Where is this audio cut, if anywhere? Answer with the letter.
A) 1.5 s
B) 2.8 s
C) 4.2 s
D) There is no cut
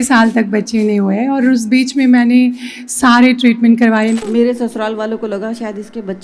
C